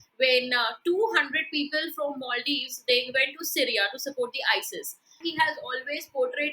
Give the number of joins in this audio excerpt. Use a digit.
1